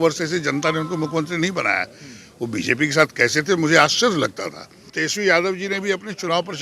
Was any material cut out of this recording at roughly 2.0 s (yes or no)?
no